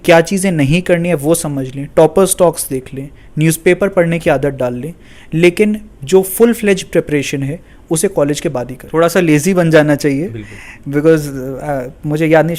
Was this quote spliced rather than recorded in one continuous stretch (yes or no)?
yes